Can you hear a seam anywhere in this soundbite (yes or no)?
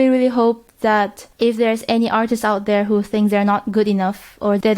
yes